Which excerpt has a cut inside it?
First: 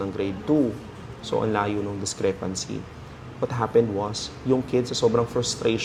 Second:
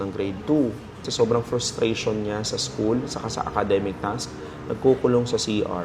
second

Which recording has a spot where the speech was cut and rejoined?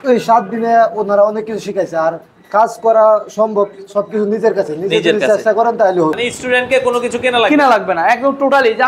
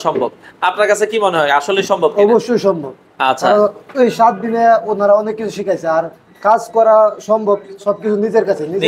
first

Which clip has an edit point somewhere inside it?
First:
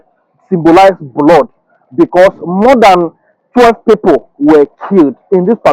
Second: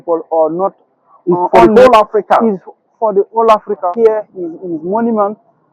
second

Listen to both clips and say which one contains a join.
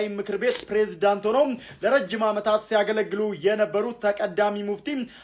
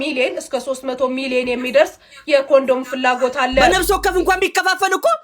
second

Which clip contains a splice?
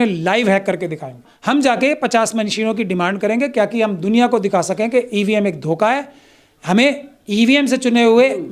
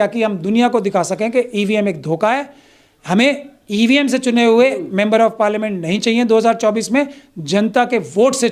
first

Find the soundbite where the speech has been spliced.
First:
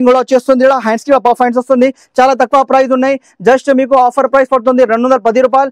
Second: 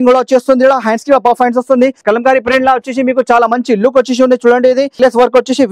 second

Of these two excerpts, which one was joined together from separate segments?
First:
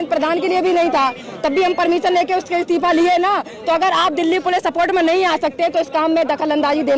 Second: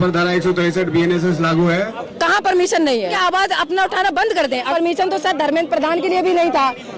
second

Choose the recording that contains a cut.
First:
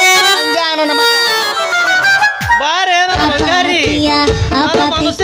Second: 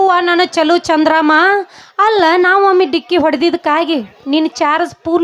first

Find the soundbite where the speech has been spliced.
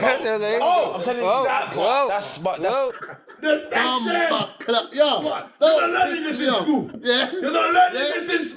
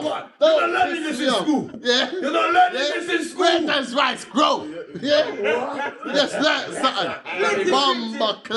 first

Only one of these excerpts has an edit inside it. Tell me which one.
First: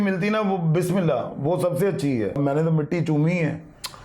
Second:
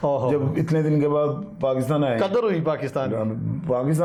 first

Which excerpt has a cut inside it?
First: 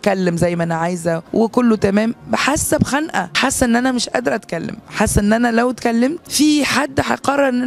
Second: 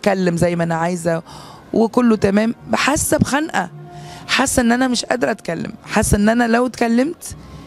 first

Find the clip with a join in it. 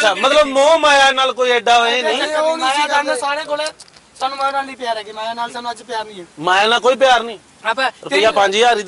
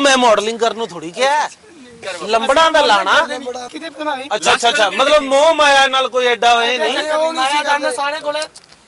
second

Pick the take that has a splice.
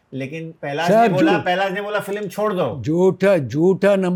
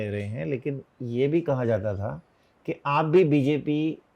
second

